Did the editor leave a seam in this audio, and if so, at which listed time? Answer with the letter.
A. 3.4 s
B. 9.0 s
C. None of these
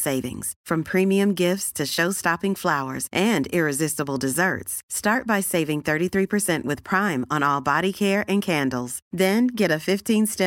C